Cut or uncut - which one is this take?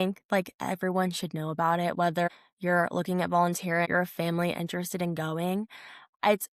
cut